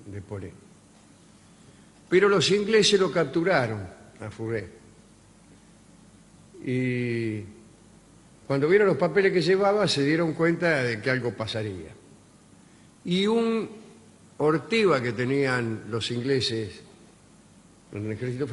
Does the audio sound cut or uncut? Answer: uncut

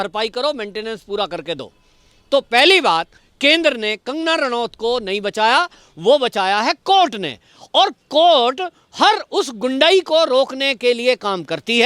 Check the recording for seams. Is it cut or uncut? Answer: uncut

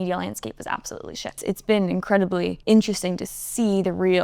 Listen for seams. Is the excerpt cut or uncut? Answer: cut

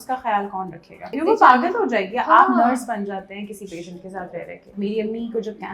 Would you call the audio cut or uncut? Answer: cut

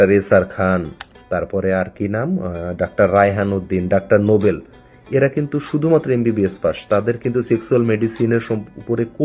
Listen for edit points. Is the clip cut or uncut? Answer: uncut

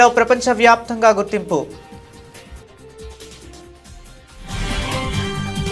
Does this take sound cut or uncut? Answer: cut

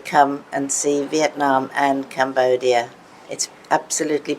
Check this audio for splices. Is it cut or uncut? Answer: uncut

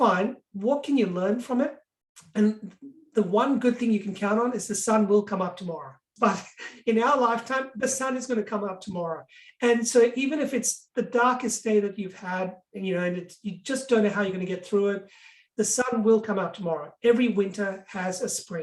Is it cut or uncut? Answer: cut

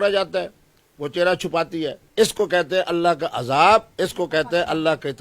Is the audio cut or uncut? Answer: cut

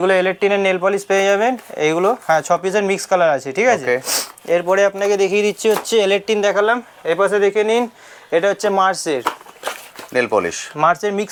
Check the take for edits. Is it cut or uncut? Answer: uncut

